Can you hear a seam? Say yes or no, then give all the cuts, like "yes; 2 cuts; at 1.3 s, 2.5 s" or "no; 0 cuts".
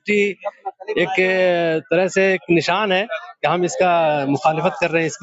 no; 0 cuts